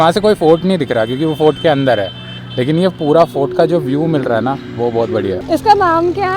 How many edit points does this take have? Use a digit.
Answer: 1